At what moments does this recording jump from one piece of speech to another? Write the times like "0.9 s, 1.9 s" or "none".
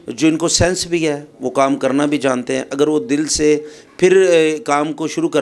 none

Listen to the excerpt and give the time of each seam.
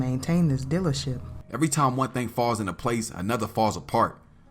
1.4 s

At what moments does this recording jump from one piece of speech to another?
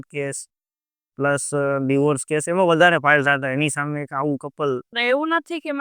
4.9 s

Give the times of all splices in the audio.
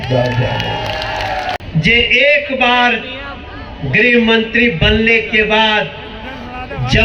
none

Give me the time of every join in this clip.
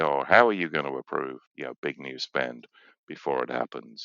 1.4 s

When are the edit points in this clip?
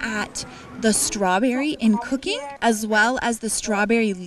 2.5 s

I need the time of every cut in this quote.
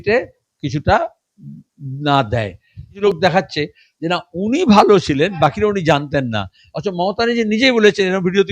3.0 s

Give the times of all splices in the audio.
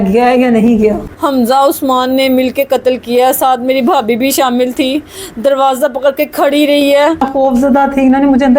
1.3 s, 7.2 s

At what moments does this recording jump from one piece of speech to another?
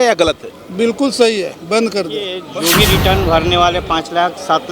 2.4 s

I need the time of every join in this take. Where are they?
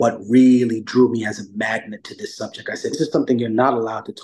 3.0 s

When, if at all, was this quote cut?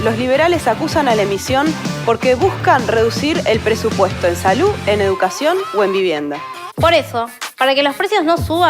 6.6 s

